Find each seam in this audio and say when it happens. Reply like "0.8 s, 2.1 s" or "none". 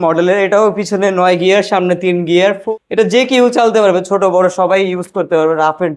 2.6 s